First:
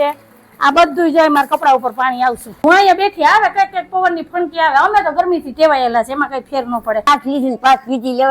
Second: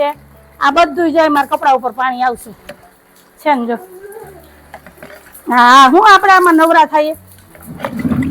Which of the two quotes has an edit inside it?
first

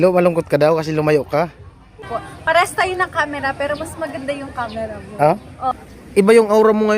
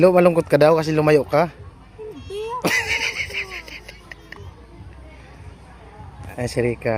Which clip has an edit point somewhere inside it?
first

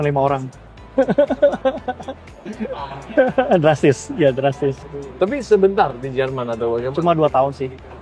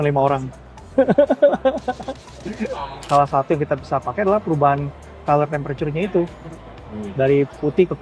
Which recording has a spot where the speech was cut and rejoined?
second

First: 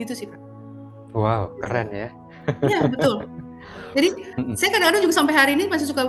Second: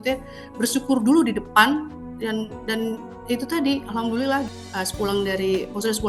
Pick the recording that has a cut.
second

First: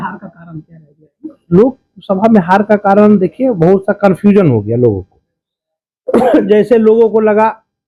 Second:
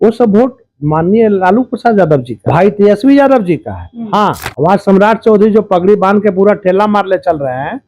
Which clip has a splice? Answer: second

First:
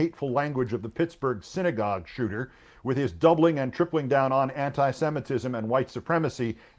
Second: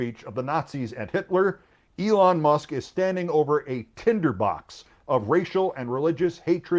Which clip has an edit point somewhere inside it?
second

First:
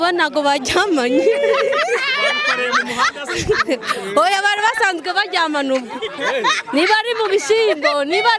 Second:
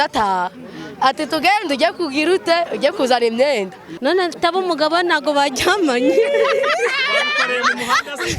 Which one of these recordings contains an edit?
second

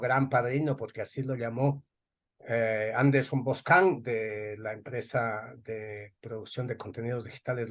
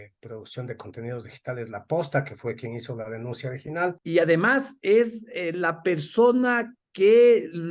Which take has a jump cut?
second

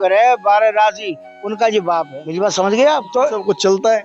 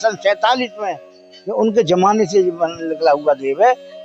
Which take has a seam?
first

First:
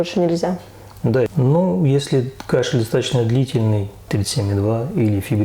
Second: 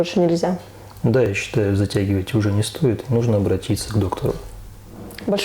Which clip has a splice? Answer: first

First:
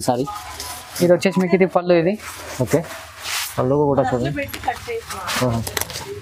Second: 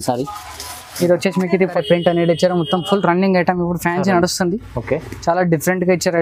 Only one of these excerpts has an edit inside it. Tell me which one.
second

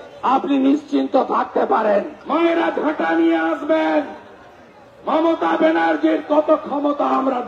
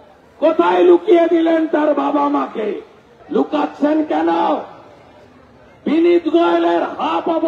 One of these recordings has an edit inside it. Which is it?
first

